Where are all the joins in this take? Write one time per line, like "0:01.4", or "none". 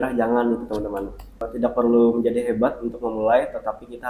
0:01.5